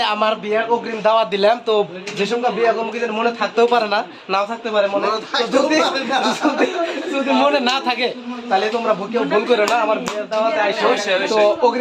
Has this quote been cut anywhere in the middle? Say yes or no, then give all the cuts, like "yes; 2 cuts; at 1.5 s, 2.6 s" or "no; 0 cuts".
no; 0 cuts